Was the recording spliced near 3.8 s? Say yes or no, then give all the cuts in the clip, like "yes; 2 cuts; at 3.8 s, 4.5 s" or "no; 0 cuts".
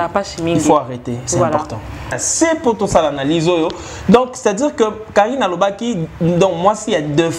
no; 1 cut; at 2.1 s